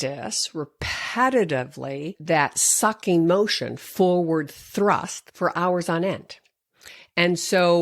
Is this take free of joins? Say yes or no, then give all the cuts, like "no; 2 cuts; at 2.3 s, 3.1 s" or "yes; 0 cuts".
no; 2 cuts; at 2.1 s, 5.2 s